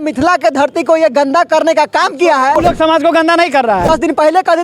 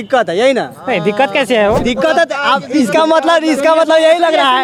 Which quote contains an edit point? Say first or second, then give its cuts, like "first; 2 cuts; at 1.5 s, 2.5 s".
first; 2 cuts; at 2.6 s, 3.9 s